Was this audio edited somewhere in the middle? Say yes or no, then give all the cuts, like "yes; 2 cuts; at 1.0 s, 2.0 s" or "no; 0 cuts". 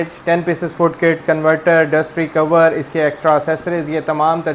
no; 0 cuts